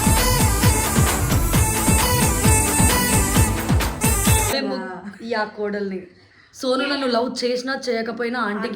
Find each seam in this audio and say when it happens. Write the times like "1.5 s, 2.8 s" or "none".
4.5 s